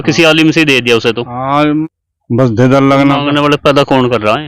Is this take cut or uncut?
cut